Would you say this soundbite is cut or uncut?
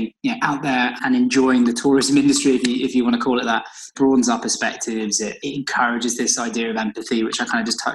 cut